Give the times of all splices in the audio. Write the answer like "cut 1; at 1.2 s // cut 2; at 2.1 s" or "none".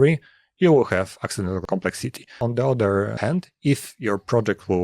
cut 1; at 2.1 s // cut 2; at 3.1 s